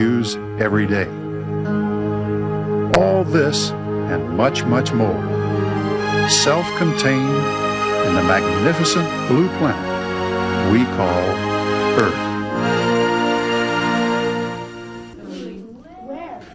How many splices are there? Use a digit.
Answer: 1